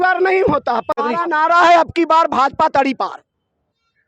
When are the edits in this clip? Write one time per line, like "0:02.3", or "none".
0:00.9